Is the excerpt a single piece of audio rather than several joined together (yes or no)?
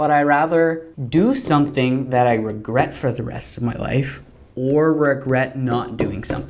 no